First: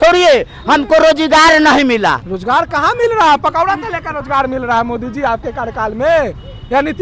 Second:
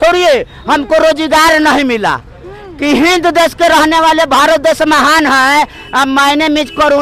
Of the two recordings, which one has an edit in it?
first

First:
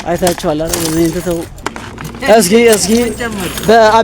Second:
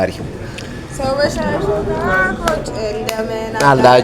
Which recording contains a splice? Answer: first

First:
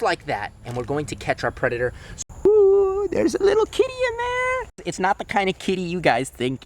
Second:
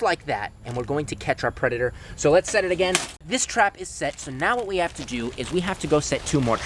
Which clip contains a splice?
first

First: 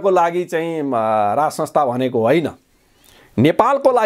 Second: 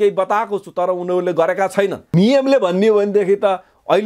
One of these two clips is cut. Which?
second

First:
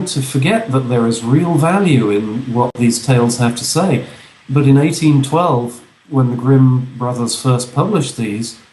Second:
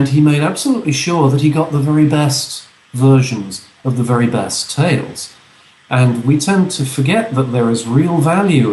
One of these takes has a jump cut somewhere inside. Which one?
first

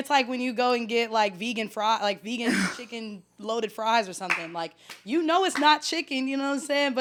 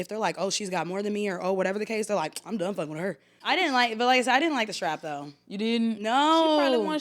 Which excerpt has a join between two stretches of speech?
second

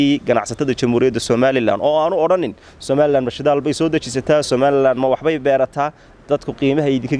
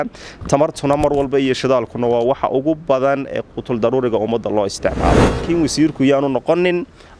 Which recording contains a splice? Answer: second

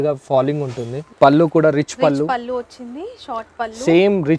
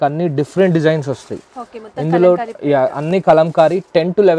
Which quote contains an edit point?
first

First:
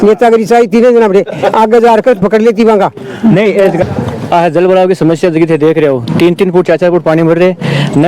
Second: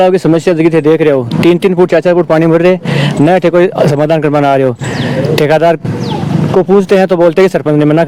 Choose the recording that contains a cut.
first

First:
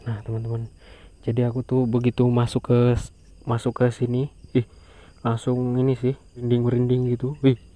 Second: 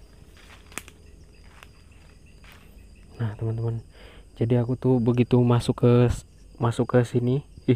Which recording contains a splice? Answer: first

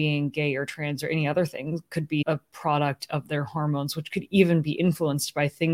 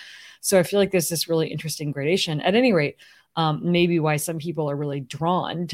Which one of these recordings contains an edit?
first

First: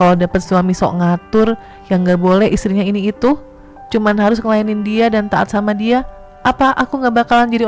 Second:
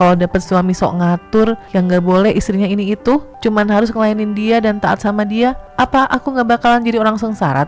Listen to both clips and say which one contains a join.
second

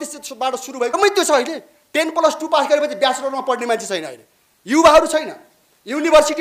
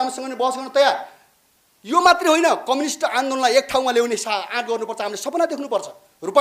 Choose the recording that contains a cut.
first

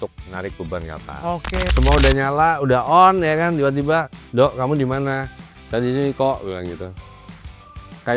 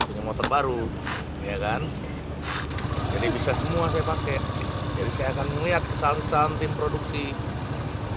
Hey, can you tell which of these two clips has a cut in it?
first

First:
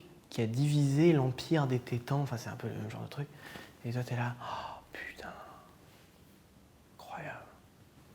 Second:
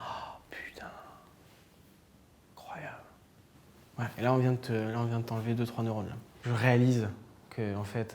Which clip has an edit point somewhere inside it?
second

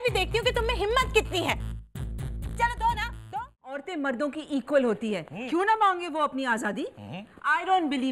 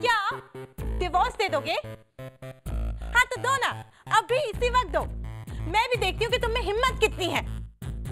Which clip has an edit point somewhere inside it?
first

